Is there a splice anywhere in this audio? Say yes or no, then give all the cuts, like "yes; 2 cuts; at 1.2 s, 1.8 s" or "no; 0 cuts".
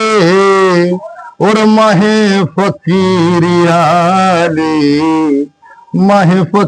no; 0 cuts